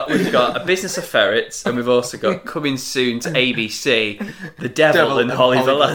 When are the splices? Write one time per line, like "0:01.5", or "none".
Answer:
none